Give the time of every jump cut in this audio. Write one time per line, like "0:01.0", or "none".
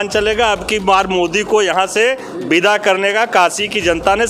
none